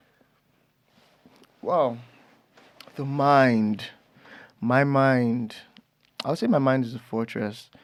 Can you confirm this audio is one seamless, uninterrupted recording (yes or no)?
yes